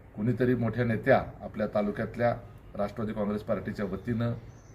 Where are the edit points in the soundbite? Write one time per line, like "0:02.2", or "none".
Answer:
0:01.4